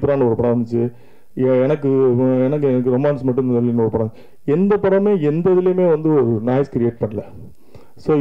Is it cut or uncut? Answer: uncut